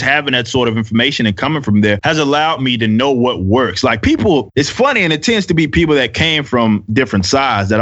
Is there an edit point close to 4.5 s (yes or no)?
yes